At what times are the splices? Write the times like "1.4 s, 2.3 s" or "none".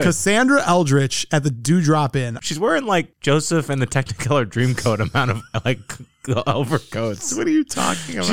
2.4 s